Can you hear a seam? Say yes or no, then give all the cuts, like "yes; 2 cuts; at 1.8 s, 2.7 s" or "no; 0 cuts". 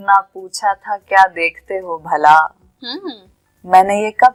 no; 0 cuts